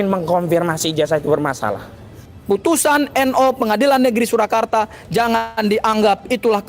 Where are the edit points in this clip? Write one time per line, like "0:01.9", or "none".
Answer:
0:02.3